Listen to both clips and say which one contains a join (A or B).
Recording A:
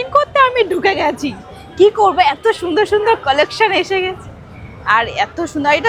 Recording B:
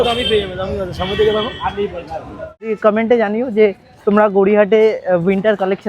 B